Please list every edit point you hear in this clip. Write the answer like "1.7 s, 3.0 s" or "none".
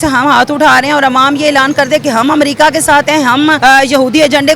3.6 s